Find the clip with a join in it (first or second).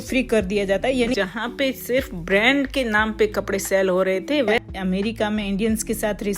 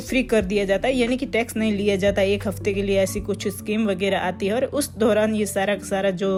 first